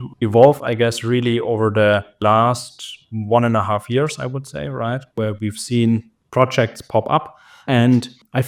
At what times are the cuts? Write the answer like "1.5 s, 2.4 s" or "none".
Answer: none